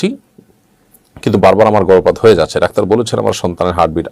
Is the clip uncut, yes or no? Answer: yes